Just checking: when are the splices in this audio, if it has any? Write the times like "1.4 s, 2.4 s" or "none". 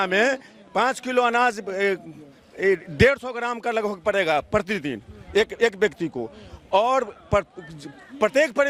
none